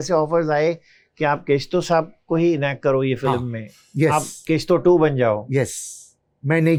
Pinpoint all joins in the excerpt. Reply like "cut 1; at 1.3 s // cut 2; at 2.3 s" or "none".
none